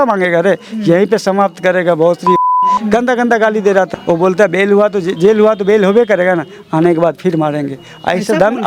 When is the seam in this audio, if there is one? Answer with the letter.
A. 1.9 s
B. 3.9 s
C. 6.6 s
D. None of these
B